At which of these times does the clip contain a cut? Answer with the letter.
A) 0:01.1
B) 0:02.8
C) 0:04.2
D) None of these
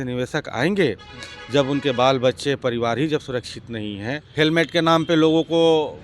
C